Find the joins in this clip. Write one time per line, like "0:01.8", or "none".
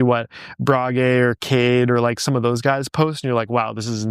none